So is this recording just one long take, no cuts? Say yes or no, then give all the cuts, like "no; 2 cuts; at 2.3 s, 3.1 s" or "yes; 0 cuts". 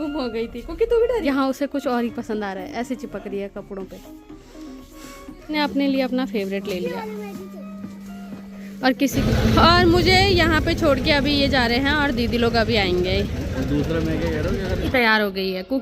no; 4 cuts; at 1.2 s, 5.5 s, 9.1 s, 14.9 s